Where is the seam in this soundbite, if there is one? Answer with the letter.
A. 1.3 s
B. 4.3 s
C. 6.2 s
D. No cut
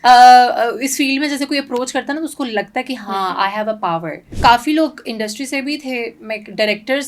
B